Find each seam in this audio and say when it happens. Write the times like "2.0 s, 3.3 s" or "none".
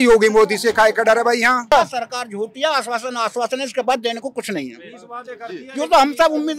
1.6 s